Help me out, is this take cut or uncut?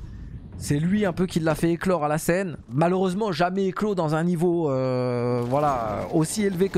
cut